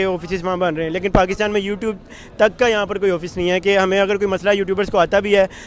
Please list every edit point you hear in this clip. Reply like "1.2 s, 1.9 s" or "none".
none